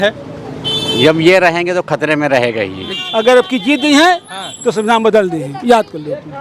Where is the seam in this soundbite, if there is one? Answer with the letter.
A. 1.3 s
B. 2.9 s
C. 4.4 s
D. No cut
B